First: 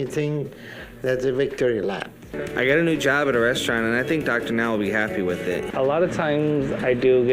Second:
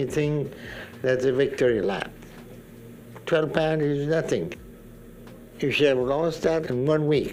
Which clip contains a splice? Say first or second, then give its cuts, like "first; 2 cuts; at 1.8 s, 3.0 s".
first; 2 cuts; at 2.4 s, 5.7 s